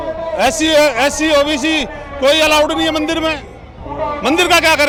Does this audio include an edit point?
no; 0 cuts

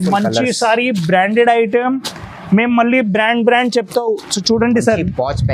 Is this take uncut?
yes; 0 cuts

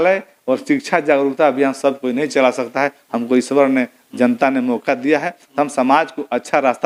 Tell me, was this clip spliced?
no; 0 cuts

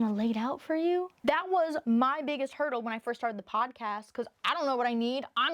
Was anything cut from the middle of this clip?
yes; 1 cut; at 1.1 s

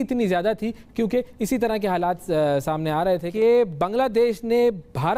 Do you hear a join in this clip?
yes; 1 cut; at 3.3 s

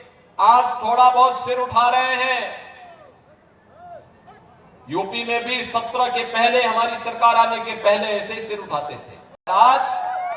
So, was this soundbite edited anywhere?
yes; 1 cut; at 9.5 s

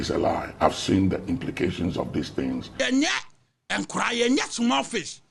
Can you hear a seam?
yes; 1 cut; at 2.8 s

